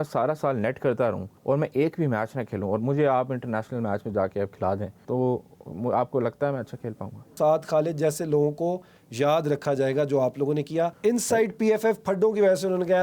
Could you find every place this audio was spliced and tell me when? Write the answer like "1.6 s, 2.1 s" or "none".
1.3 s, 5.0 s, 7.3 s, 11.0 s